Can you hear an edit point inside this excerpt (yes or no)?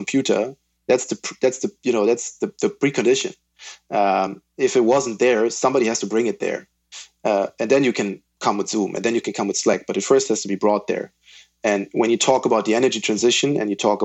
no